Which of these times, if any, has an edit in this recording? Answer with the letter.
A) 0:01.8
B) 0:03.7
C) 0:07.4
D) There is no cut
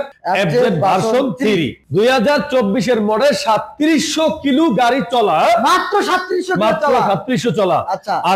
A